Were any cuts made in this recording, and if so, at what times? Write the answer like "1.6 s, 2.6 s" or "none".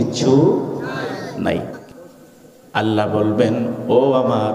1.8 s